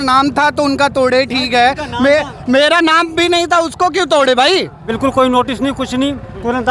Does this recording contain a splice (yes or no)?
yes